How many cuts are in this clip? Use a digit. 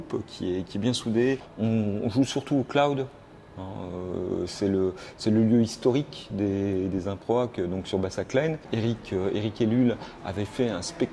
2